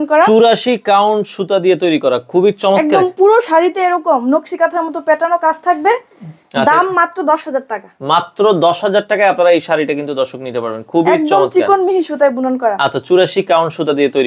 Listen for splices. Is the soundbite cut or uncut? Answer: uncut